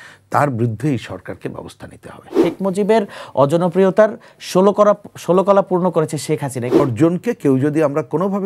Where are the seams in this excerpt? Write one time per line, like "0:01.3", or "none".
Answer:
0:02.4
0:06.8